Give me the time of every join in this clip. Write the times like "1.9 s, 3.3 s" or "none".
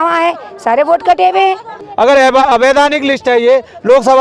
1.7 s